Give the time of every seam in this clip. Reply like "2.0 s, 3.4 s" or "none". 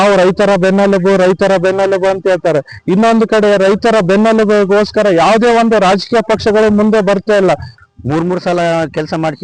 7.7 s